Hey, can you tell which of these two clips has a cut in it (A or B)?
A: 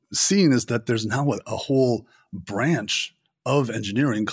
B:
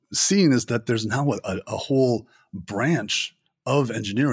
A